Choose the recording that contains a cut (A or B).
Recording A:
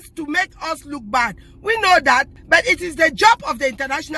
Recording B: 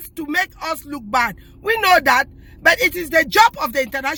A